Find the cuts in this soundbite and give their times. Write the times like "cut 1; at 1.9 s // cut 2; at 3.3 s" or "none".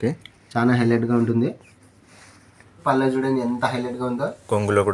cut 1; at 2.7 s